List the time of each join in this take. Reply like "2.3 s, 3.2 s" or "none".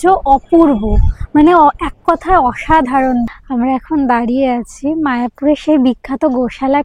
3.4 s